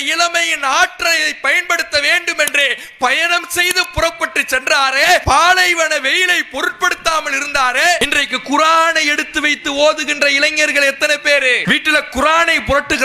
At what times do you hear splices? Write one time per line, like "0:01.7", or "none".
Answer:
0:05.2
0:08.0
0:11.6